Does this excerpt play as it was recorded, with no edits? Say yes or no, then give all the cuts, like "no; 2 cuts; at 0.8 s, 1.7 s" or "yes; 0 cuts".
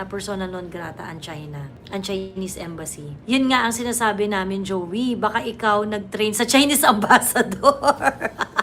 yes; 0 cuts